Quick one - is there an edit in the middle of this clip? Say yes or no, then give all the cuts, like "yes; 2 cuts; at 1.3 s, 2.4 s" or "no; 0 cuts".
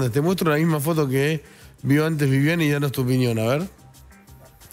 no; 0 cuts